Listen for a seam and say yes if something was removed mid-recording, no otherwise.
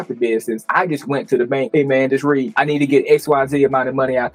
no